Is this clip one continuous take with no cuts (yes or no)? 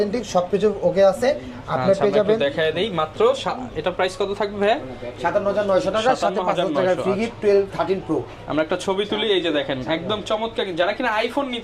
yes